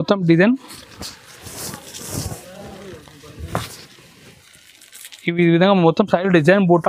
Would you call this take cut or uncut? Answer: uncut